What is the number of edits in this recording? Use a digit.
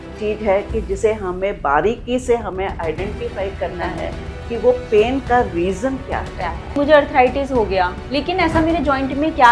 2